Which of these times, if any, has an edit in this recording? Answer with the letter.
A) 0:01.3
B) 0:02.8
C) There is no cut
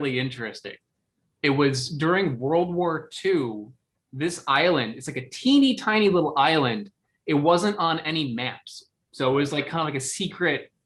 A